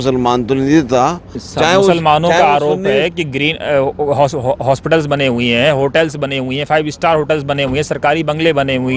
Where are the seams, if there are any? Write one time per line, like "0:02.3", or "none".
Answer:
0:01.4